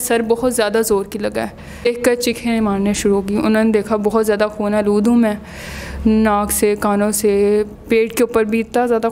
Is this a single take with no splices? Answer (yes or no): no